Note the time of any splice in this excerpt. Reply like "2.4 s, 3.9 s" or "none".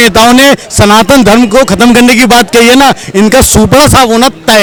none